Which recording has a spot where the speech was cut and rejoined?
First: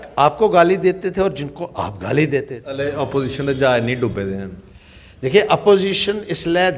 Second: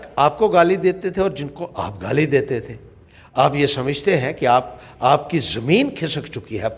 first; 1 cut; at 2.6 s

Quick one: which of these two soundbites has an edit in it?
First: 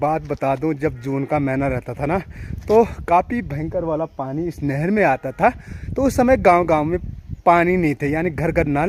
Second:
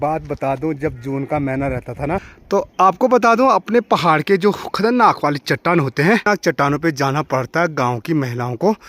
second; 2 cuts; at 2.3 s, 6.3 s

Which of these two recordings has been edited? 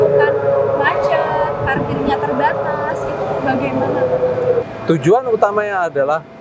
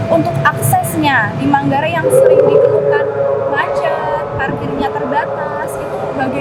first; 1 cut; at 4.6 s

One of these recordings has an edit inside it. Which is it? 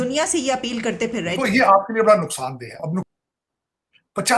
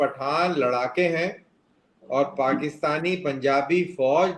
first; 2 cuts; at 1.3 s, 3.1 s

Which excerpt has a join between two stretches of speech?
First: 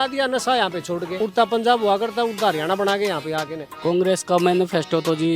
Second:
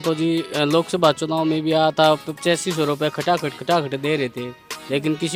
first; 2 cuts; at 1.1 s, 3.6 s

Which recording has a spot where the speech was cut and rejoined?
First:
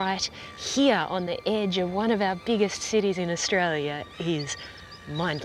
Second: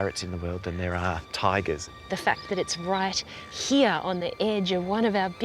second; 2 cuts; at 1.3 s, 2.0 s

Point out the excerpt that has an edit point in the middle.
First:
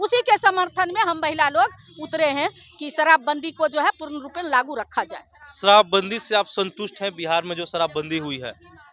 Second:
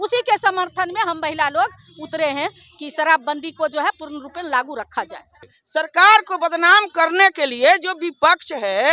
second; 1 cut; at 5.4 s

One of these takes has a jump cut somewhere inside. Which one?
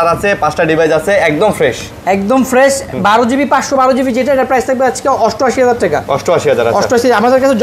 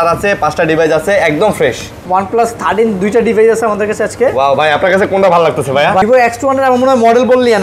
second; 2 cuts; at 1.9 s, 6.0 s

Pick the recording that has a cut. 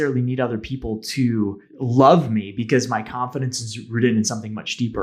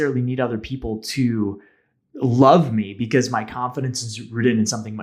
first; 1 cut; at 1.7 s

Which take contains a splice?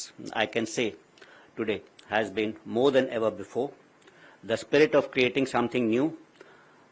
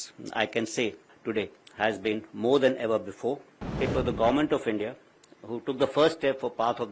second; 2 cuts; at 1.1 s, 3.8 s

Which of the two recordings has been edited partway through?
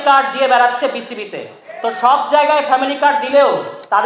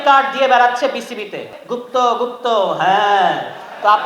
second; 1 cut; at 1.6 s

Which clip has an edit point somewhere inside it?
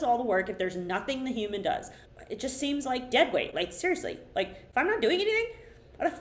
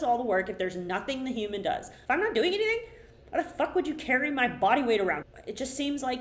second; 2 cuts; at 1.9 s, 5.3 s

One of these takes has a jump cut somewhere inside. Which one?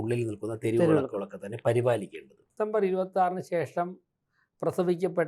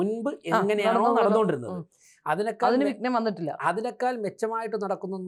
first; 1 cut; at 2.5 s

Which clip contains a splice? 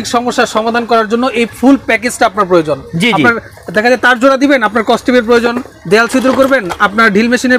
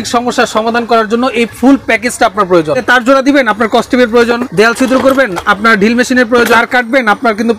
second; 3 cuts; at 2.8 s, 4.5 s, 6.6 s

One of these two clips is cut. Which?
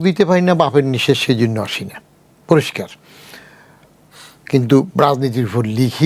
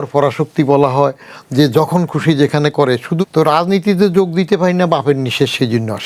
second; 1 cut; at 3.2 s

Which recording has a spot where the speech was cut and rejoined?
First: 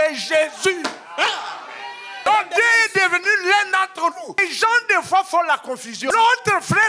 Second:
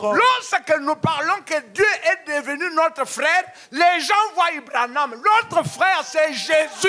first; 3 cuts; at 2.3 s, 4.4 s, 5.9 s

